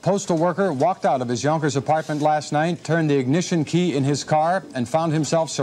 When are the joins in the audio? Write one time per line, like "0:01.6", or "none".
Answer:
none